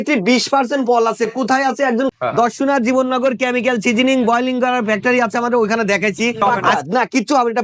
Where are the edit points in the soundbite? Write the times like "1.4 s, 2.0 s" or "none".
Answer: 2.1 s, 6.4 s